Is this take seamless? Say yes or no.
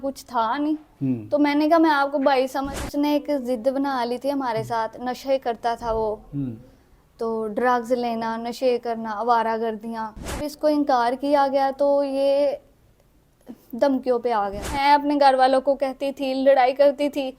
no